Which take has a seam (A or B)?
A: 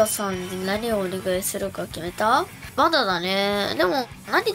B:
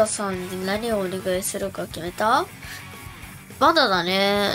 A